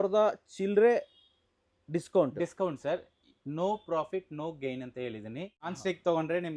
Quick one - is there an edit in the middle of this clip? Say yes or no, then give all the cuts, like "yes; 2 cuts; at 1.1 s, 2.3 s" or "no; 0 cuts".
yes; 1 cut; at 5.6 s